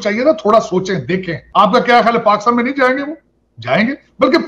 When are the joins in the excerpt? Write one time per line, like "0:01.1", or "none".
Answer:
0:01.4